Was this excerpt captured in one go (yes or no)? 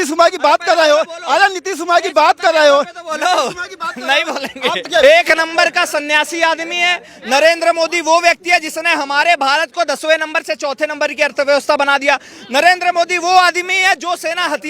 no